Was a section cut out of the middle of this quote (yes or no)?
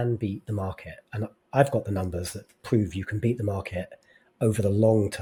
no